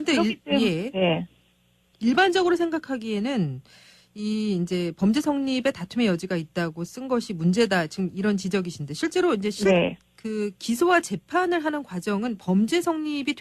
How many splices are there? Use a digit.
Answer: 1